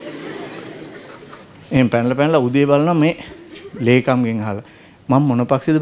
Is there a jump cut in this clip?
yes; 1 cut; at 1.5 s

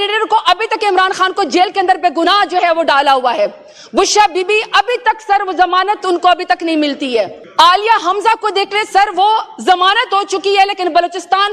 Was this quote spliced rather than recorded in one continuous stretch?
no; 0 cuts

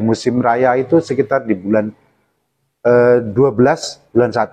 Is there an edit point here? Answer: no; 0 cuts

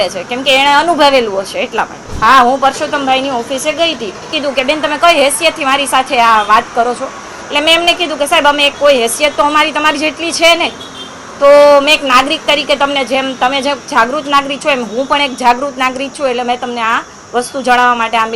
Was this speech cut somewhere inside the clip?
yes; 2 cuts; at 2.0 s, 4.3 s

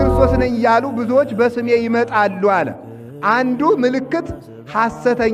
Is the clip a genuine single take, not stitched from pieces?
yes; 0 cuts

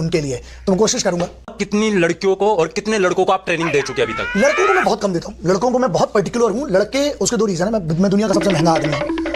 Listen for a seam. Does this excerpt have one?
yes; 1 cut; at 1.6 s

